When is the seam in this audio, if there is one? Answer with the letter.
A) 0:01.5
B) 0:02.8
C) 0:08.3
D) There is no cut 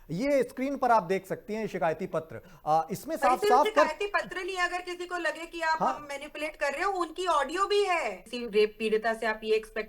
C